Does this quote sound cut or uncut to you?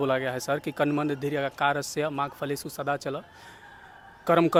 uncut